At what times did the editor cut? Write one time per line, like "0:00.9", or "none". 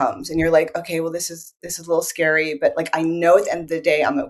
none